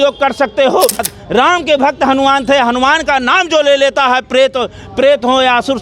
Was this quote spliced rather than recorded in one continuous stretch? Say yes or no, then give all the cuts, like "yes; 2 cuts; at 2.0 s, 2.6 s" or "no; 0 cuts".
yes; 1 cut; at 1.0 s